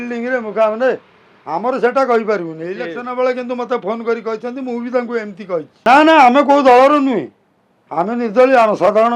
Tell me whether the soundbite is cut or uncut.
cut